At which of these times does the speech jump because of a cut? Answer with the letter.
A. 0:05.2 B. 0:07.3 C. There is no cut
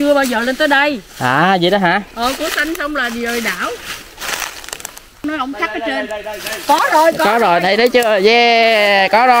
A